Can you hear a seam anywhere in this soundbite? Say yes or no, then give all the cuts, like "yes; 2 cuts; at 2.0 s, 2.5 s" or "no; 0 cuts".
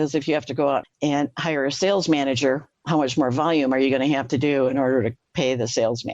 yes; 3 cuts; at 0.9 s, 2.7 s, 5.2 s